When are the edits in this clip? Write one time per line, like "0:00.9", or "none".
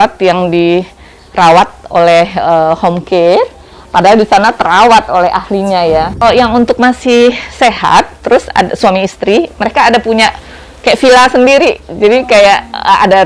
0:06.2